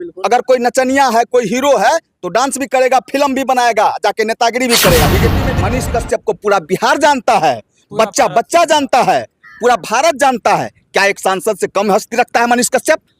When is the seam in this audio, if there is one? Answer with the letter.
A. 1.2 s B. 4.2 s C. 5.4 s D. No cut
C